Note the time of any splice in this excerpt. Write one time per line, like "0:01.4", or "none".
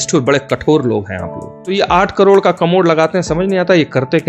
0:01.7